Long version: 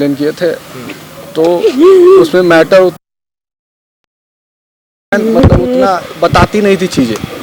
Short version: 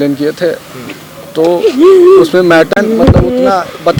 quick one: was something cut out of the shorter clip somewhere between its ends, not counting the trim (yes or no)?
yes